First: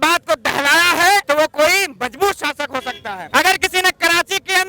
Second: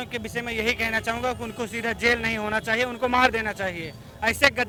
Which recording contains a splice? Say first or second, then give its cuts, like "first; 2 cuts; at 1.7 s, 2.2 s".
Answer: first; 2 cuts; at 1.2 s, 3.1 s